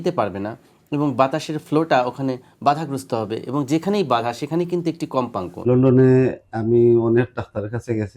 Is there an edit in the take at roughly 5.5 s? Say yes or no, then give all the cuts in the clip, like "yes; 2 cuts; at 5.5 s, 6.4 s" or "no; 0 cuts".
yes; 1 cut; at 5.5 s